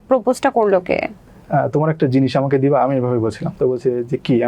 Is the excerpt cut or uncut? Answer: cut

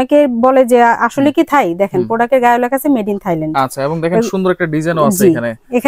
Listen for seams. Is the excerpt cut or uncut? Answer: uncut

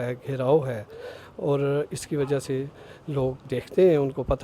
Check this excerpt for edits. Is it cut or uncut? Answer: cut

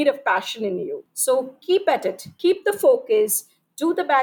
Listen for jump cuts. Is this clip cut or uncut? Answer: cut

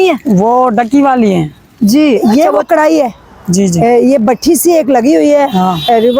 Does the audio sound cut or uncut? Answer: cut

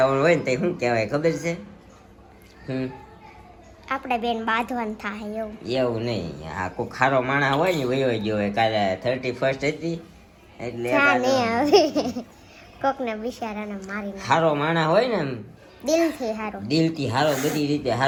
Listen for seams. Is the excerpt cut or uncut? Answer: uncut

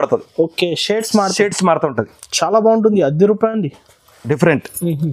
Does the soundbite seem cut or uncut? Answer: uncut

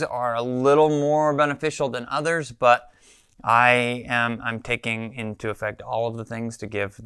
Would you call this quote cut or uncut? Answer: uncut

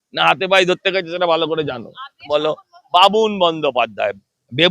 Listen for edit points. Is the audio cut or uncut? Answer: cut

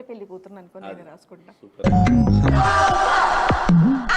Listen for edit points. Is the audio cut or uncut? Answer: uncut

